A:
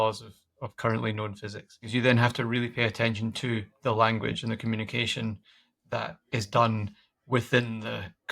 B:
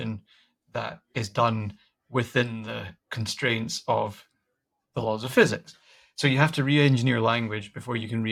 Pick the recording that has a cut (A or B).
A